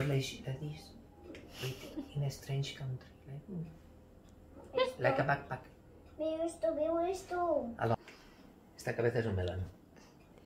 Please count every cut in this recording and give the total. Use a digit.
1